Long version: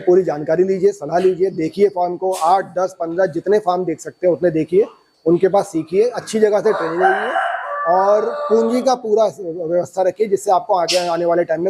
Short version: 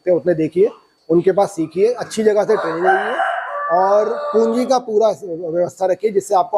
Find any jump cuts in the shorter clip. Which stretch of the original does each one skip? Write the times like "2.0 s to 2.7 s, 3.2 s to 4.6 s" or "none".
none